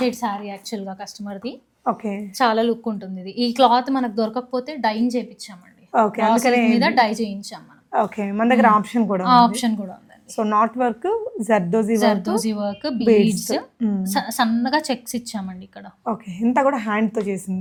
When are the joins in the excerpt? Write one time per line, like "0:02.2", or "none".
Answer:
none